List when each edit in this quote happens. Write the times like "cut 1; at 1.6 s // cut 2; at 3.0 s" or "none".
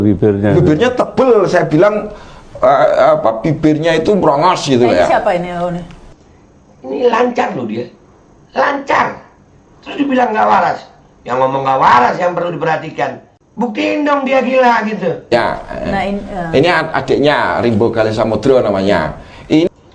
cut 1; at 13.3 s